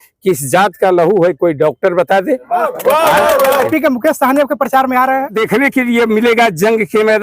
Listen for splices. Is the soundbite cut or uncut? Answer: cut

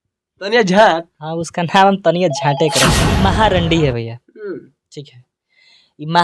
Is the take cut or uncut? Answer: cut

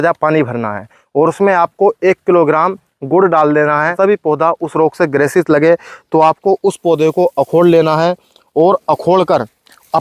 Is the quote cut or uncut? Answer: cut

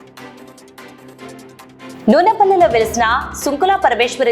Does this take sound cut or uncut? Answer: cut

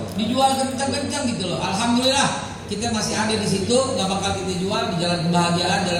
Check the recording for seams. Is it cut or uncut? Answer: uncut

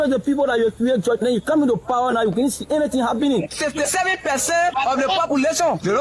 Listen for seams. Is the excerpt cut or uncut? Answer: cut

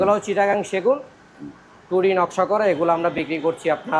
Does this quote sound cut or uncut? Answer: uncut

